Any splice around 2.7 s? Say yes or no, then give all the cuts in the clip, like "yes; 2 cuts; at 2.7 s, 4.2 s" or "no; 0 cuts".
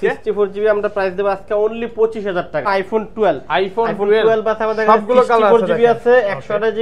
yes; 1 cut; at 2.7 s